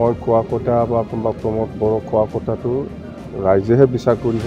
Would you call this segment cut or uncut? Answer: uncut